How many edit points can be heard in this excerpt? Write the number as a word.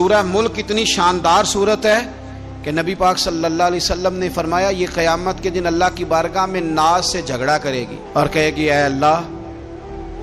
zero